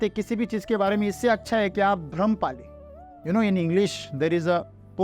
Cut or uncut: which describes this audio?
uncut